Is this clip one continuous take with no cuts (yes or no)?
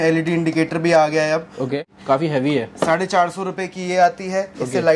no